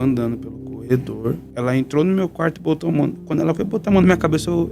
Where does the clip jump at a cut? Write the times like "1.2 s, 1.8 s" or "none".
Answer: 1.4 s